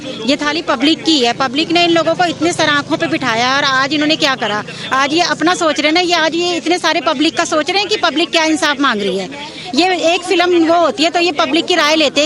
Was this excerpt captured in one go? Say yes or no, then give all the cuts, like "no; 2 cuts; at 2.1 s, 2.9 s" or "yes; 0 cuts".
yes; 0 cuts